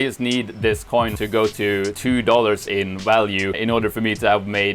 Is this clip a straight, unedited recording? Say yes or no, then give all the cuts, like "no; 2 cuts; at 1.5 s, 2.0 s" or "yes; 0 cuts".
no; 3 cuts; at 1.1 s, 2.0 s, 3.6 s